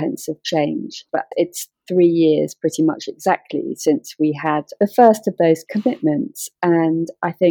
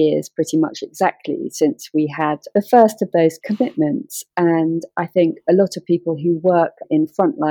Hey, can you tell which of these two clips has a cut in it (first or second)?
first